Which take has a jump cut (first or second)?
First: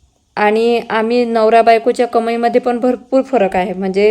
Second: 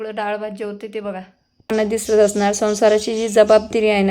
second